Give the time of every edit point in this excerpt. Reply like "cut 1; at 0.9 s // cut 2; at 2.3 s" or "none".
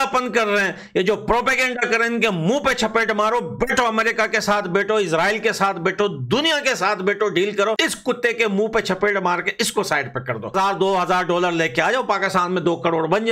cut 1; at 7.8 s // cut 2; at 10.5 s